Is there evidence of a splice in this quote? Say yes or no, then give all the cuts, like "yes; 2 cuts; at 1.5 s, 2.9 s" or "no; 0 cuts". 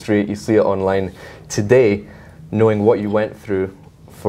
no; 0 cuts